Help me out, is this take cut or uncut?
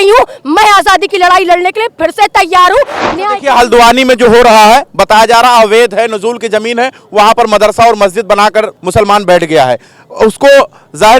cut